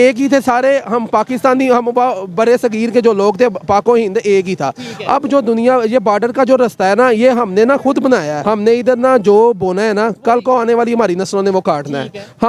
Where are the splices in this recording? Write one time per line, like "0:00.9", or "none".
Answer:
0:08.3